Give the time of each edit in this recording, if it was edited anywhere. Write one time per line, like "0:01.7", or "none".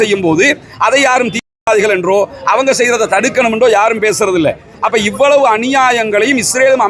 none